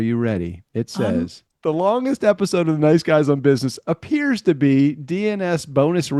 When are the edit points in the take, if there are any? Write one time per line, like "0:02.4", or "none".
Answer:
0:01.5